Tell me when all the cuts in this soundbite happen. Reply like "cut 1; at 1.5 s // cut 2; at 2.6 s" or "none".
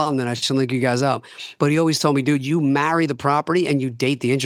none

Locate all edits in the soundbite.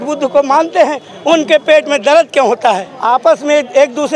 cut 1; at 2.9 s

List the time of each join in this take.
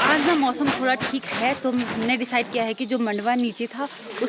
none

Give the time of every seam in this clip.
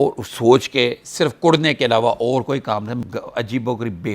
cut 1; at 3.0 s

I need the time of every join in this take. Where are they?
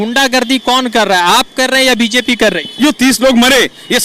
cut 1; at 2.8 s

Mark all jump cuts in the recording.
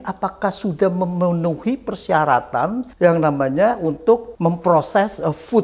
cut 1; at 2.9 s // cut 2; at 4.3 s

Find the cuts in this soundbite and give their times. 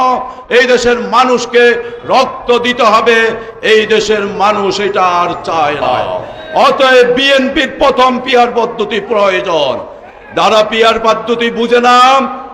cut 1; at 6.3 s

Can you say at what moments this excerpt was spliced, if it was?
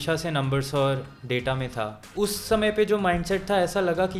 cut 1; at 2.0 s

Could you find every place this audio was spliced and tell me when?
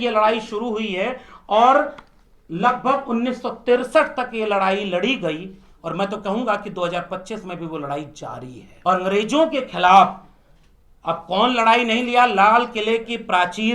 cut 1; at 8.6 s

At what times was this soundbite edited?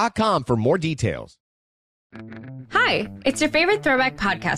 cut 1; at 1.4 s

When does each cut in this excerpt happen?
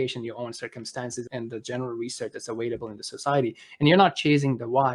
cut 1; at 1.3 s

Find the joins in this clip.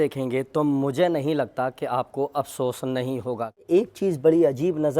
cut 1; at 3.7 s

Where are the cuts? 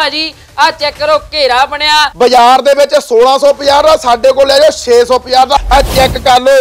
cut 1; at 2.1 s // cut 2; at 5.6 s

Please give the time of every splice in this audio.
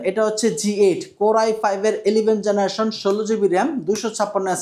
none

